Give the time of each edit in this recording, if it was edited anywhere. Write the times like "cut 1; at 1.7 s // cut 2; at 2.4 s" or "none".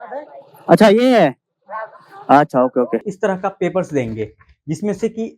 cut 1; at 3.1 s